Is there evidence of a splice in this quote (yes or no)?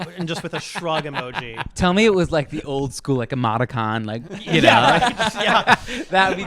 yes